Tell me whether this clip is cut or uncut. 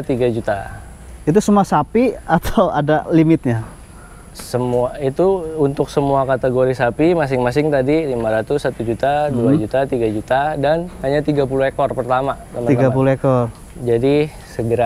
uncut